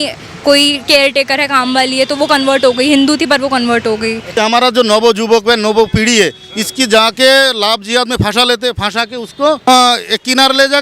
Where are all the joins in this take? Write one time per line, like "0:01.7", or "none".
0:04.3
0:09.6